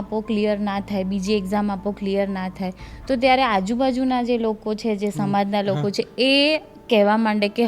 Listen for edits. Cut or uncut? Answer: uncut